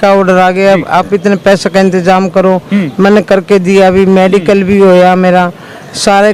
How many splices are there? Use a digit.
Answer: 0